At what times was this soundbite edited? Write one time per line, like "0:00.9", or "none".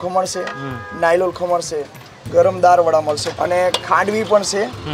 0:03.3